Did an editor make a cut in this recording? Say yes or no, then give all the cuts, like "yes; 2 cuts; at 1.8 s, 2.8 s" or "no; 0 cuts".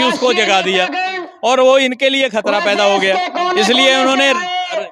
no; 0 cuts